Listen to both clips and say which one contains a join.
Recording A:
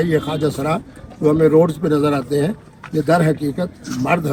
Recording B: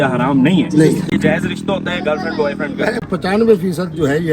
B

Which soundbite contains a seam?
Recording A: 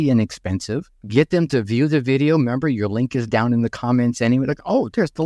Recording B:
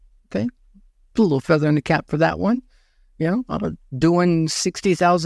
A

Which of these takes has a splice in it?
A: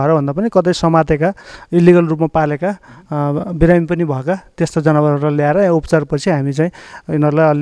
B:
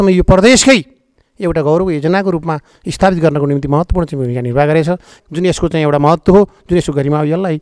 B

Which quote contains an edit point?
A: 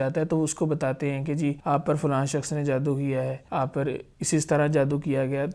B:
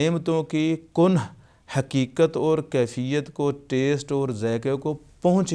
A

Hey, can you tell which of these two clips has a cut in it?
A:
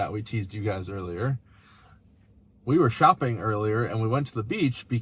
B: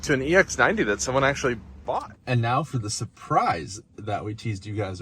B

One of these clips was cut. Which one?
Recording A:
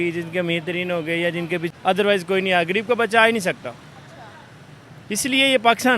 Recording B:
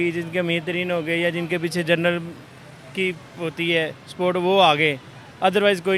A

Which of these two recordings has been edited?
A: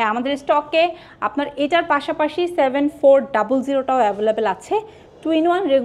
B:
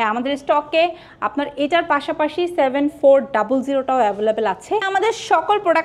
B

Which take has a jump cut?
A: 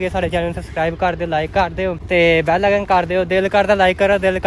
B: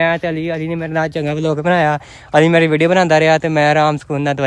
A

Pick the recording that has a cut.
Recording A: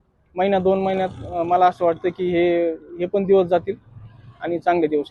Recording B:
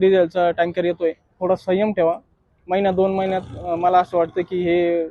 B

